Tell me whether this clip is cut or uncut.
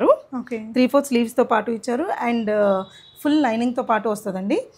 uncut